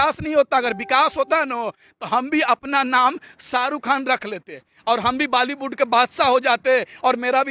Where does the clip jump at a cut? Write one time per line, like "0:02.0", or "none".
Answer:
none